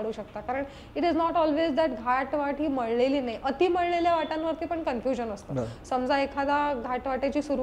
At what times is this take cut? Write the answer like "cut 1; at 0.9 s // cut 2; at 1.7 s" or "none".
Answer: none